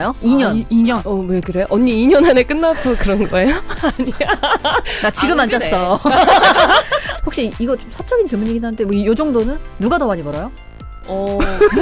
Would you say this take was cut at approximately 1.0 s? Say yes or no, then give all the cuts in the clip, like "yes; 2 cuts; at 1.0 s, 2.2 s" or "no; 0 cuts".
yes; 3 cuts; at 1.0 s, 4.9 s, 7.1 s